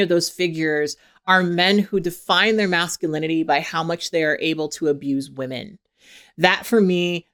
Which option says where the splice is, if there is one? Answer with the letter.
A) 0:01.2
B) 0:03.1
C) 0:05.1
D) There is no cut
D